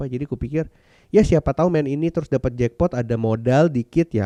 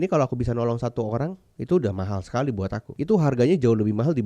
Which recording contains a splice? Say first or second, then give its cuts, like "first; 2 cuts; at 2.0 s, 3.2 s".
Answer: second; 2 cuts; at 1.5 s, 2.8 s